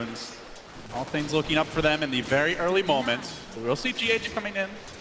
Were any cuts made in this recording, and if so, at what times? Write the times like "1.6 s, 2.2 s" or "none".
2.6 s